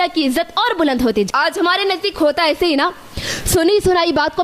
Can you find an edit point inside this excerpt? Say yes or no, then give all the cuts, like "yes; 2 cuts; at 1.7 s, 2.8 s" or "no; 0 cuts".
yes; 1 cut; at 1.3 s